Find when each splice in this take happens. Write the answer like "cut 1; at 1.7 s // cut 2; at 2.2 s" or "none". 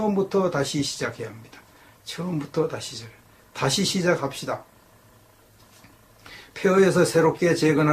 cut 1; at 4.9 s